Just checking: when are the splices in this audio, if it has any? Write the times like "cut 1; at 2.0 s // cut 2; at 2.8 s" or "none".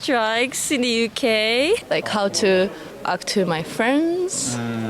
cut 1; at 1.8 s